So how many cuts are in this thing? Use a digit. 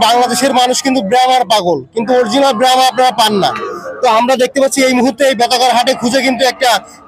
0